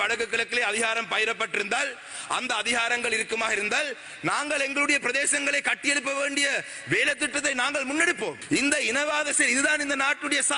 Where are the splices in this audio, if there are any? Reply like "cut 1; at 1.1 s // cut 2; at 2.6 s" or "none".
cut 1; at 8.4 s